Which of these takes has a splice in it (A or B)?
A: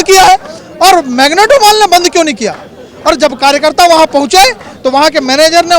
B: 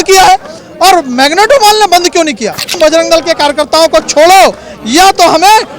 B